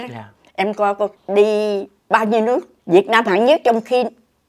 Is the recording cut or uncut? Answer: cut